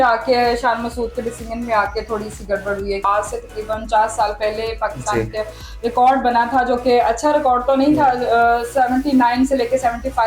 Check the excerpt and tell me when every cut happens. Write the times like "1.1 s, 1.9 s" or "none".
3.0 s

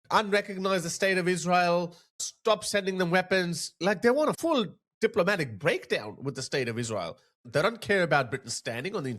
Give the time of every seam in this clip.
3.8 s, 7.4 s

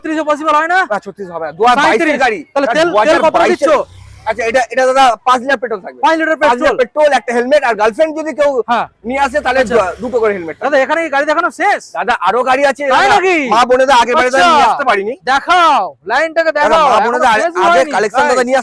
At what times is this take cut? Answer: none

